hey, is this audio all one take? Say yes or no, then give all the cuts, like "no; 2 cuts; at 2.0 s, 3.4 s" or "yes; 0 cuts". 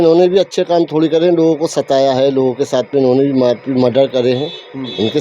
yes; 0 cuts